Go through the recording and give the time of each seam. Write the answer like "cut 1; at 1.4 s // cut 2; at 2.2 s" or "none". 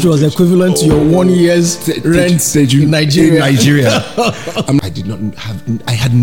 cut 1; at 4.8 s